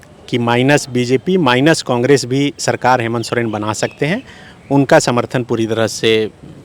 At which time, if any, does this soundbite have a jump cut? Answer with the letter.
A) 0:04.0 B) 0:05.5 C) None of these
C